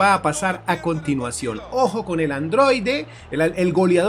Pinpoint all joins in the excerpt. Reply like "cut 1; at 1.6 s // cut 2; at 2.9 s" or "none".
none